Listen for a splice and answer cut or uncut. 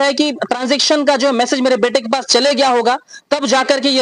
uncut